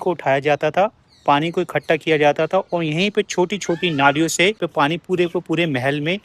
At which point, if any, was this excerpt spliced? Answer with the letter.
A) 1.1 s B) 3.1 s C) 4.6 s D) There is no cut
C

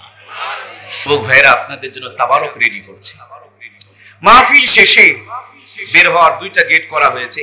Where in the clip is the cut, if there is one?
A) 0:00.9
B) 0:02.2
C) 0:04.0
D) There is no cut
A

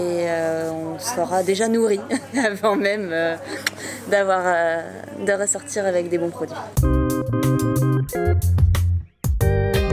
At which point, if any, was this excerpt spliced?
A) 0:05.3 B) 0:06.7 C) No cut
B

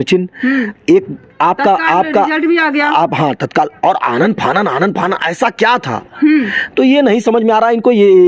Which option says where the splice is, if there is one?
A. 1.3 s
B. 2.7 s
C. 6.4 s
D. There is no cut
D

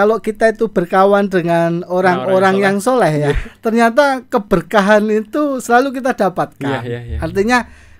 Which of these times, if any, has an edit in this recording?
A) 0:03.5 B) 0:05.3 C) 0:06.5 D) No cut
D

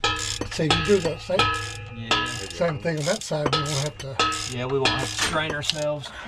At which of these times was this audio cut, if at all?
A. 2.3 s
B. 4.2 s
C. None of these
C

